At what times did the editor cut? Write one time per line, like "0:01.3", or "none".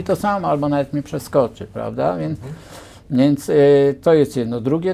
none